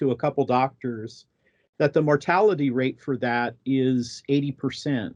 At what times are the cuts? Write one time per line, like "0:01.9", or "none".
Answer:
none